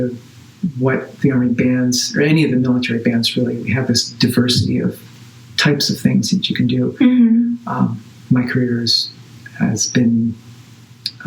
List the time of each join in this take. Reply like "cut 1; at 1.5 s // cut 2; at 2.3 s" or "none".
none